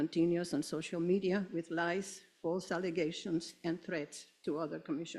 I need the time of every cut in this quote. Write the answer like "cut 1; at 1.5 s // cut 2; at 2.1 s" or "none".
cut 1; at 3.5 s